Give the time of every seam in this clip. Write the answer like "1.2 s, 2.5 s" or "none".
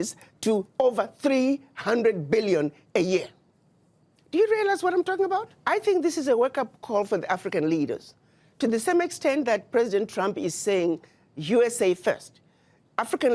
5.5 s